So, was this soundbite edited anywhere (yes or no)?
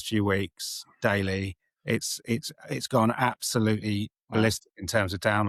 no